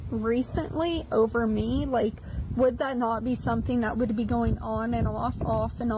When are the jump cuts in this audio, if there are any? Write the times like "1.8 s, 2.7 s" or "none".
none